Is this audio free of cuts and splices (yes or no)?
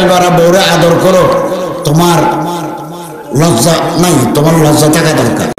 yes